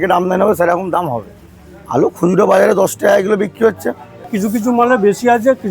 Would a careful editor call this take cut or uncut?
cut